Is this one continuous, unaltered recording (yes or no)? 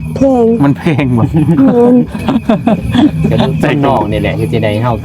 no